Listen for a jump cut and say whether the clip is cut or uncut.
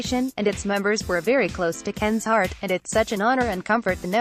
uncut